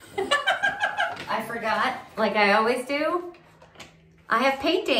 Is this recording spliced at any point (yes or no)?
yes